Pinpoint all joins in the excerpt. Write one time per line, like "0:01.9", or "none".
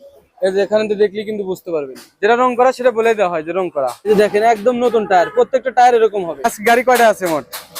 0:04.0
0:06.4